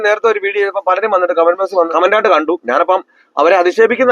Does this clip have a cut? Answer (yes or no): yes